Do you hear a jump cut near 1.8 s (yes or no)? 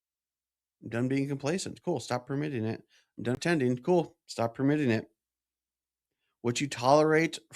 no